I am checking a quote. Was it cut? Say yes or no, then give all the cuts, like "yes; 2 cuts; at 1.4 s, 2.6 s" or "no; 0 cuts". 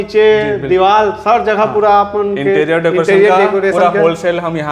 no; 0 cuts